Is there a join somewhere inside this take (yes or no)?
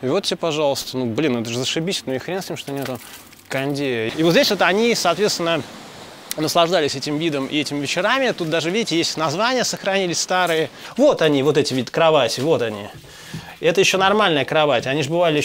yes